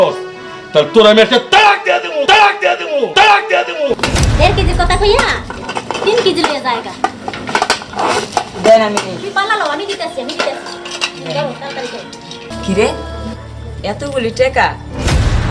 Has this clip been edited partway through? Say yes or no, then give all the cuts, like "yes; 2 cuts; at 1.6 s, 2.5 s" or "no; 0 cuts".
yes; 2 cuts; at 4.0 s, 12.4 s